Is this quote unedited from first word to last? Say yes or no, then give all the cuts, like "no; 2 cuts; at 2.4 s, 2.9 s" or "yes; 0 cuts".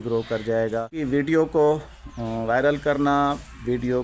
no; 1 cut; at 0.9 s